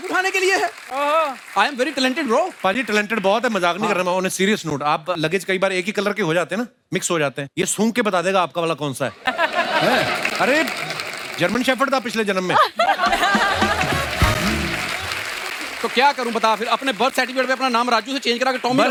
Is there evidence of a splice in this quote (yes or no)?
no